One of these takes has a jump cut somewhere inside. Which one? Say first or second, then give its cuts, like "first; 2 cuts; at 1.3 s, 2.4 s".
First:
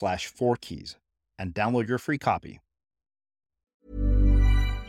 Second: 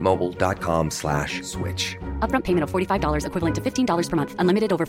first; 1 cut; at 3.8 s